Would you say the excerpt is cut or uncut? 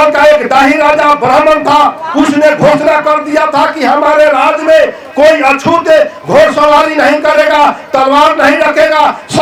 uncut